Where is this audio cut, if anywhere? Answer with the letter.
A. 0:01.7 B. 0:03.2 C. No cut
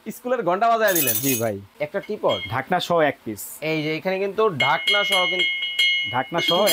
A